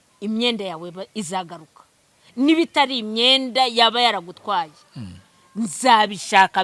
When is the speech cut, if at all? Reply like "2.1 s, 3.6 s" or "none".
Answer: none